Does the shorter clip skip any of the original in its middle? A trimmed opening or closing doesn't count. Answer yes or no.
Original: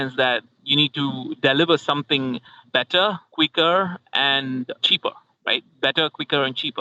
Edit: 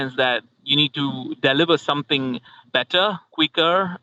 no